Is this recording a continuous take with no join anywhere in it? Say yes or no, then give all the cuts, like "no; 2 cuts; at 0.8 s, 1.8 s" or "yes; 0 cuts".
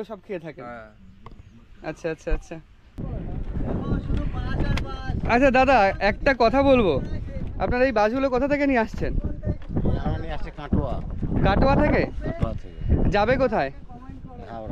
no; 1 cut; at 3.1 s